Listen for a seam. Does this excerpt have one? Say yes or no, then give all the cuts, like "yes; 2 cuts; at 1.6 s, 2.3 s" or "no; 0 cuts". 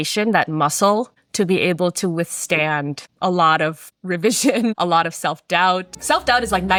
no; 0 cuts